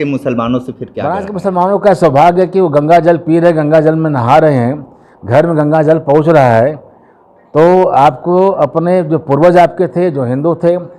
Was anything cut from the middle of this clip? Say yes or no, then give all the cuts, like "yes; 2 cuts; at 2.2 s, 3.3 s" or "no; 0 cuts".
yes; 1 cut; at 1.0 s